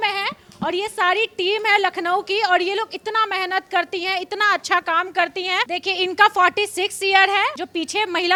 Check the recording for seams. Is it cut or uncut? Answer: uncut